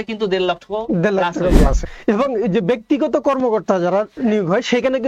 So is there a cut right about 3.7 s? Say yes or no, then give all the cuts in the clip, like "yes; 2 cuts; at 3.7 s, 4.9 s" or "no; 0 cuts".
no; 1 cut; at 1.9 s